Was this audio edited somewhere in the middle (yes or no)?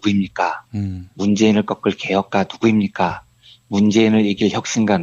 no